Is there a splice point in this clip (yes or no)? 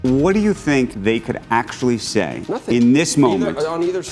yes